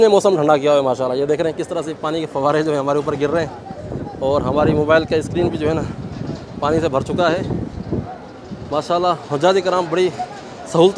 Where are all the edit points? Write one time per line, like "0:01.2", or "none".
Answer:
none